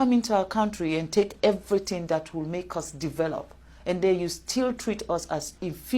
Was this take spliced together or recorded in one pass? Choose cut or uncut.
uncut